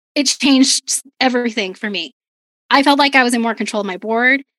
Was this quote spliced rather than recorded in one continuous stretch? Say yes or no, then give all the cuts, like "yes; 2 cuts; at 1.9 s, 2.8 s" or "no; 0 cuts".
no; 0 cuts